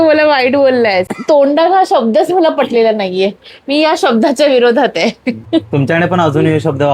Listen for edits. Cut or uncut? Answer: cut